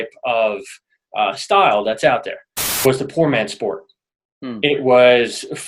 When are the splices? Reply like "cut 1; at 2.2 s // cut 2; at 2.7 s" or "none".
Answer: cut 1; at 2.9 s